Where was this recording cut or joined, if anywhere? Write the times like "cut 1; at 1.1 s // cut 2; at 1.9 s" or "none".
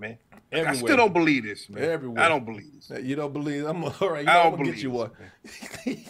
none